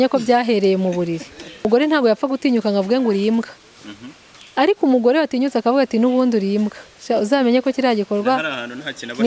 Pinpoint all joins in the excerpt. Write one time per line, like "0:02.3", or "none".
0:01.7